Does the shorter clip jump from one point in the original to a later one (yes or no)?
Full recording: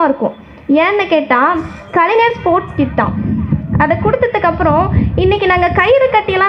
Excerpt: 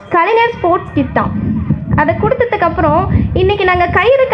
no